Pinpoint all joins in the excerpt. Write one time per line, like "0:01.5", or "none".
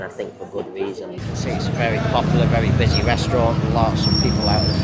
0:01.2